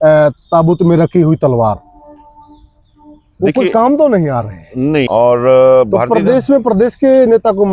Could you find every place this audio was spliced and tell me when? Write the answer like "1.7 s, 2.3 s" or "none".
5.1 s